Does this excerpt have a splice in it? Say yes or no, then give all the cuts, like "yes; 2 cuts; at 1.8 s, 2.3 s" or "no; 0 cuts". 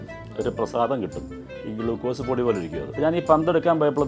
yes; 1 cut; at 2.9 s